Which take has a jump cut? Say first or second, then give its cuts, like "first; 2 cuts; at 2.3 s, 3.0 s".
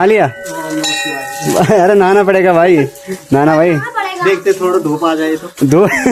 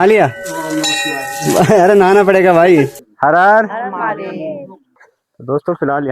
second; 2 cuts; at 3.0 s, 5.1 s